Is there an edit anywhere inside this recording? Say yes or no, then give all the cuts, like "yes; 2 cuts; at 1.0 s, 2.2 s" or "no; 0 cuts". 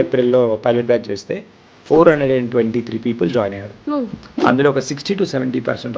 no; 0 cuts